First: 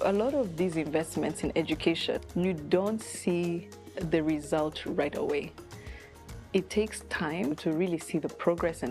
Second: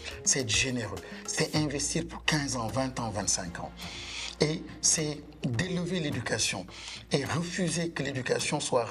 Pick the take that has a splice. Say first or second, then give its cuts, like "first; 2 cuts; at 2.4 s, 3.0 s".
first; 2 cuts; at 2.2 s, 7.6 s